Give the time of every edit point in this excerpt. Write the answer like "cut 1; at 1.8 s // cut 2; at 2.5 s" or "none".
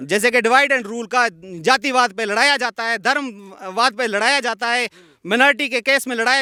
none